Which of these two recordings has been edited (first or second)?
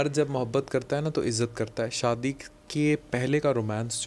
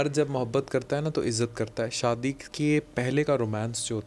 second